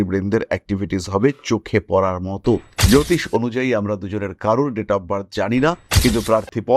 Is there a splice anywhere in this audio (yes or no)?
yes